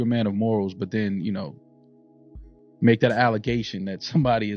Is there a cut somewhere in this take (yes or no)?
no